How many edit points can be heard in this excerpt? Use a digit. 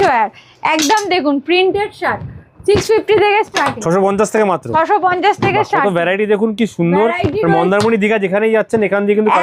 0